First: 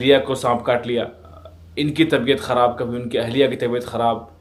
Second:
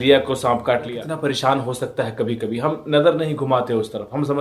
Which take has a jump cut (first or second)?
second